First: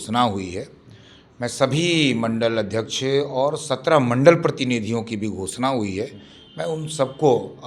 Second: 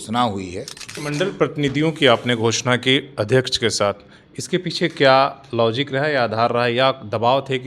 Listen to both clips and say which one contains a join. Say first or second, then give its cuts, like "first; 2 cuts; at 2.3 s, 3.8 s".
second; 1 cut; at 1.0 s